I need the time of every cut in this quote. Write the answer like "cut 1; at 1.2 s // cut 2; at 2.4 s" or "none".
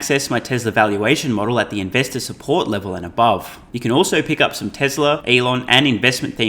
cut 1; at 3.6 s // cut 2; at 5.2 s